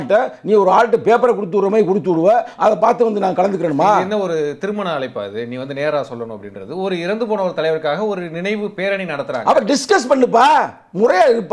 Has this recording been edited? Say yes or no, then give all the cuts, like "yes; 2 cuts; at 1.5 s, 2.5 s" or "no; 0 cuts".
no; 0 cuts